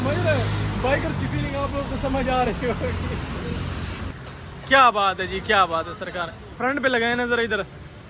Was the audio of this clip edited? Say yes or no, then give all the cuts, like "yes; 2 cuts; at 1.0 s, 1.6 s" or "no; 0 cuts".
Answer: yes; 1 cut; at 4.1 s